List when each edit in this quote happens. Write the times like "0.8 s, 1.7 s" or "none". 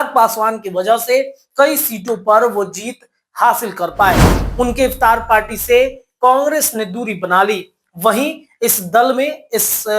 4.4 s